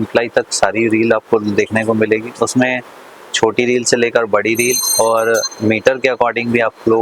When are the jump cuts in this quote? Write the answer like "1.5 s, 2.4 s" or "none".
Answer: none